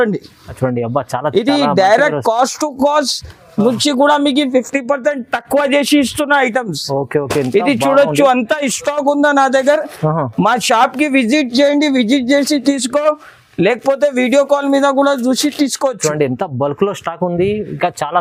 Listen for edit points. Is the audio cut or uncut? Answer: uncut